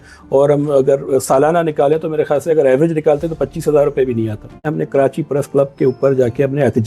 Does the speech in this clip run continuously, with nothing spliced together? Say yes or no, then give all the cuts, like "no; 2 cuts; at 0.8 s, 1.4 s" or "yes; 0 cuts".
no; 1 cut; at 4.7 s